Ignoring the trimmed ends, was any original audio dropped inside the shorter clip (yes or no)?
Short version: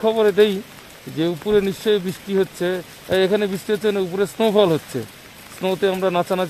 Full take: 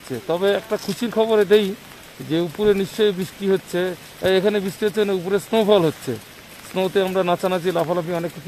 no